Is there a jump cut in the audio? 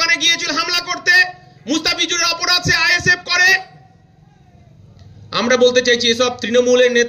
no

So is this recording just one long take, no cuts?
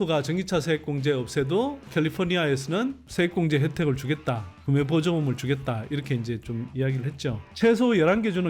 no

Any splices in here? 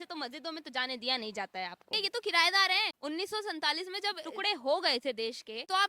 yes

